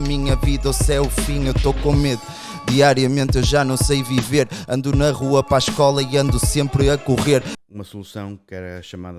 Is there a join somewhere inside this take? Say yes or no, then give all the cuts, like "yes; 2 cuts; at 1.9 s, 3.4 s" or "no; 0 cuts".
yes; 1 cut; at 7.5 s